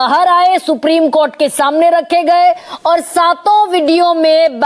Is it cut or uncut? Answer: uncut